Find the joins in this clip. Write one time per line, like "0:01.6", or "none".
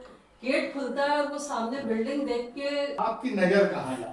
0:03.0